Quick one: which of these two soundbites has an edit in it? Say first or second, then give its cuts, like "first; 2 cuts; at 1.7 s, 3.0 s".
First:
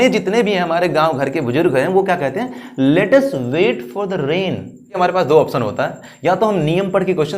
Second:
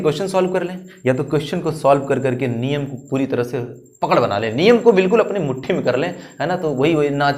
first; 1 cut; at 5.0 s